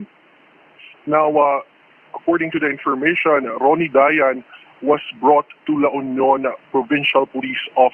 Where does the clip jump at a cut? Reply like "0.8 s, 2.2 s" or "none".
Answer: none

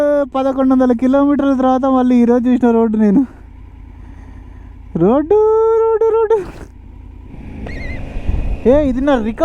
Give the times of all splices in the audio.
7.4 s

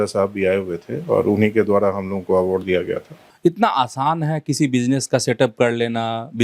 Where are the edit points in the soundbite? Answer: 3.3 s

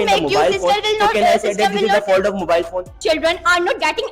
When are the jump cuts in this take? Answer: 2.9 s

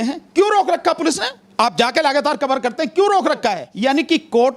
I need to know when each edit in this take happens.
3.7 s

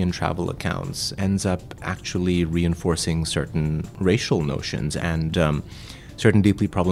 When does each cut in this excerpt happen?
1.1 s, 3.9 s, 5.0 s

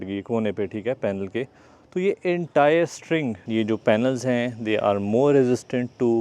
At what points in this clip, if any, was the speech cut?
3.4 s

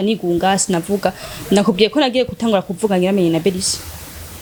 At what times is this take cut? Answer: none

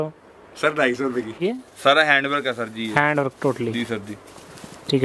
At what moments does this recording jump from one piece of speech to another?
1.4 s

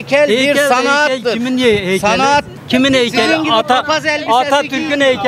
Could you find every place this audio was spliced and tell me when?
2.6 s

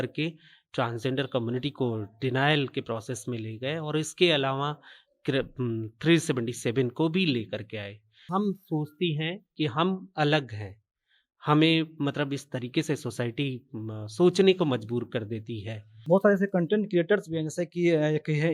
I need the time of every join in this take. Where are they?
8.2 s, 16.0 s

